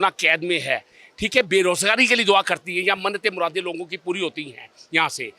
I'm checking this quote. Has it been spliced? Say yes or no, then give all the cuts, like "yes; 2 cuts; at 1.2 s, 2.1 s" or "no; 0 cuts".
no; 0 cuts